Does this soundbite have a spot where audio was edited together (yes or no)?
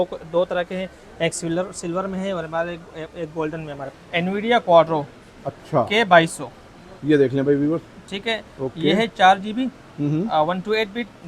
yes